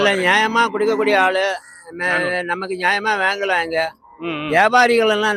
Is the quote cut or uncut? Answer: uncut